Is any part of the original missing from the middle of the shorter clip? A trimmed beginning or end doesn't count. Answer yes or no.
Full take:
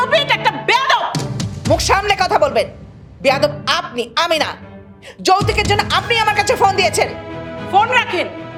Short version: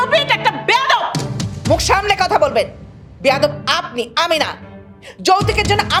no